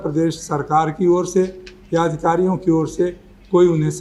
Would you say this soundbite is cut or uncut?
uncut